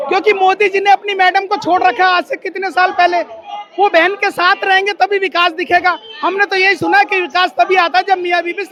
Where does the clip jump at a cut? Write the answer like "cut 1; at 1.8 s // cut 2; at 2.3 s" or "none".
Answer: none